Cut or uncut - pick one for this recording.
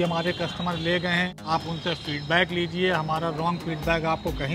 cut